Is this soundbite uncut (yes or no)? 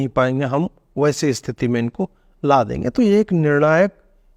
yes